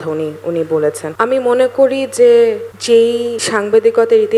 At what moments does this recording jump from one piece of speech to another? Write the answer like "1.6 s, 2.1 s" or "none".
1.1 s, 2.8 s